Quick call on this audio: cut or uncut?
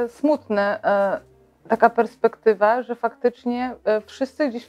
uncut